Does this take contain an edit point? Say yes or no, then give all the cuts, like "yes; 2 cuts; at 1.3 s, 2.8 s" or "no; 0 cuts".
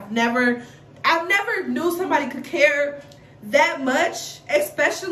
no; 0 cuts